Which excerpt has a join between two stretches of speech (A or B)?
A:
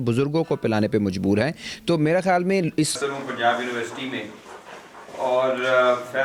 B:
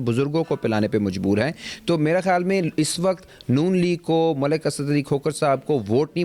A